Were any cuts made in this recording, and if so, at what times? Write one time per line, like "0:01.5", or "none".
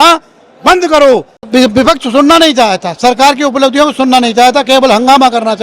0:01.3